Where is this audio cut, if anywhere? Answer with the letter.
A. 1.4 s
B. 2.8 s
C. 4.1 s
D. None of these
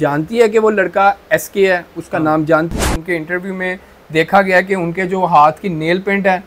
B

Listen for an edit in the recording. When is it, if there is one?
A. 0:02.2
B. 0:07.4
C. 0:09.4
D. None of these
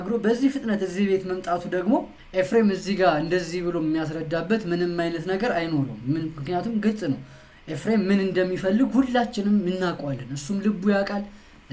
A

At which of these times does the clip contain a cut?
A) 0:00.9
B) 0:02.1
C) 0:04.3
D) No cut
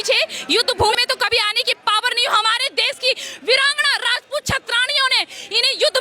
A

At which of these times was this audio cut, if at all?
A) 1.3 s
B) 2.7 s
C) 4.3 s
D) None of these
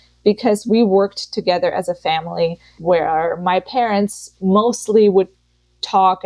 B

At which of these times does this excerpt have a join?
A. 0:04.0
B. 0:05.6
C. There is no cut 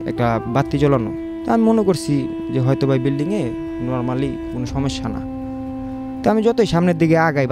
C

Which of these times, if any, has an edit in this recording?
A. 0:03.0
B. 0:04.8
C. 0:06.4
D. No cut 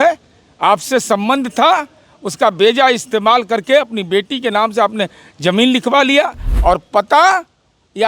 C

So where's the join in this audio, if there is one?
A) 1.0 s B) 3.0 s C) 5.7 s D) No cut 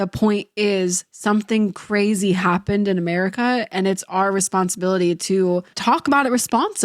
C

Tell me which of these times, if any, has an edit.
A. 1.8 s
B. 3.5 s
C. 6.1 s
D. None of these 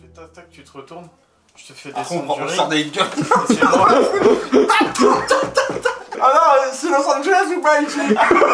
C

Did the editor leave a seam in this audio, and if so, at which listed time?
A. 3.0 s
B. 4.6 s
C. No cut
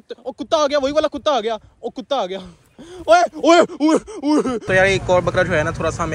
B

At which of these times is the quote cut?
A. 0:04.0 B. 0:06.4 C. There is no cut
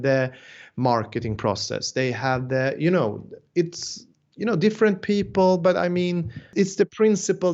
B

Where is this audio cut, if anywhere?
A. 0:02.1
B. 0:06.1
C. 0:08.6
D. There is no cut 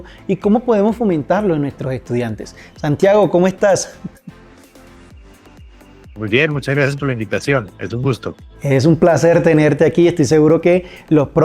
B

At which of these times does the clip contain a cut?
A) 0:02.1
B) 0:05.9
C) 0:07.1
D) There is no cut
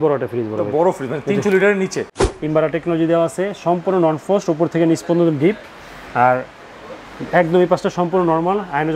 A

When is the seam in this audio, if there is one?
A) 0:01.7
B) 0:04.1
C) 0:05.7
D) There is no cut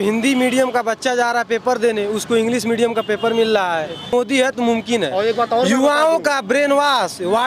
B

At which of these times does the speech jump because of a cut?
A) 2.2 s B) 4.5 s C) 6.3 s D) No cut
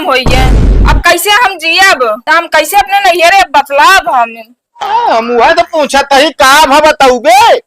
A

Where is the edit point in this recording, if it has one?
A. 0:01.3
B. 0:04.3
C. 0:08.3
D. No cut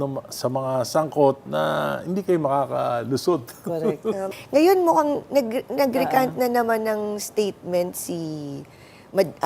B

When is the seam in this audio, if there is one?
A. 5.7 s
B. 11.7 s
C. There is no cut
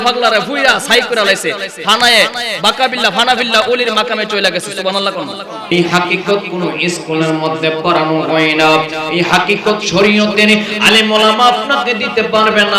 A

